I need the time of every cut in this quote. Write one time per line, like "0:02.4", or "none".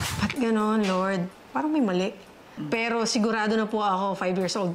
0:01.3
0:02.6